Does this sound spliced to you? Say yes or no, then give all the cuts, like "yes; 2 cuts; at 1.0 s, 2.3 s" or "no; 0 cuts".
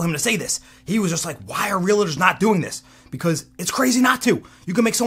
no; 0 cuts